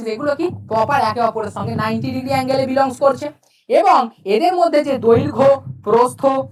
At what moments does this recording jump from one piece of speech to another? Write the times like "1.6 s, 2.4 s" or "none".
none